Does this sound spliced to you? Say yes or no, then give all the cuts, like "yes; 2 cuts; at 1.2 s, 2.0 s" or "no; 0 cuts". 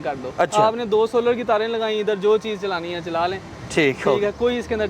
no; 0 cuts